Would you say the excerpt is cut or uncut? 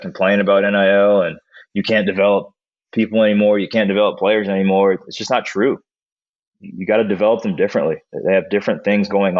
uncut